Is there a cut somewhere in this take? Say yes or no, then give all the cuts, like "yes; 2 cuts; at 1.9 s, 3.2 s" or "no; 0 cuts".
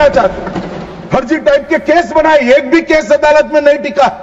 no; 0 cuts